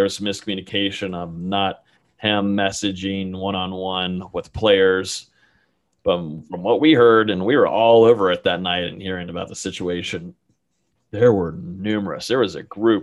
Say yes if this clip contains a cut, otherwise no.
no